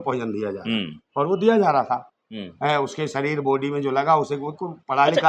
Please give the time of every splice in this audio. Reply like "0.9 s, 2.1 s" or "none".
none